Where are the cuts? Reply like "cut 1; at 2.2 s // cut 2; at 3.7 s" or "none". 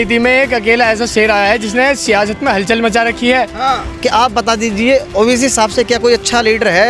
cut 1; at 3.9 s